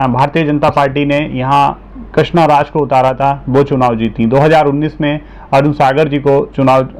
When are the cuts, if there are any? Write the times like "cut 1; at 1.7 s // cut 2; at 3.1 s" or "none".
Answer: none